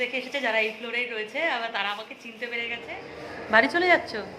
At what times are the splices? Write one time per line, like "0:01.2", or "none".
0:03.0